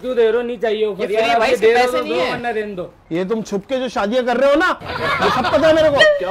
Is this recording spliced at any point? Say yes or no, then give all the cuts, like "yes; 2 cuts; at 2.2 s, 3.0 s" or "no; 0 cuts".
yes; 1 cut; at 2.9 s